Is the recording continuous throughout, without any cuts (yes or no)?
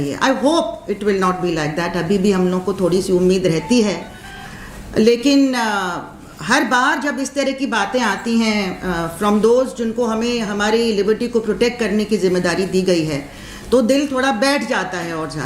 yes